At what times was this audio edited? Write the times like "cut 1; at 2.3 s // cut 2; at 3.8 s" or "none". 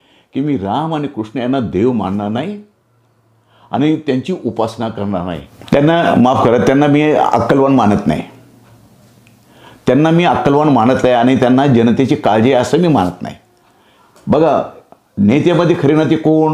cut 1; at 5.5 s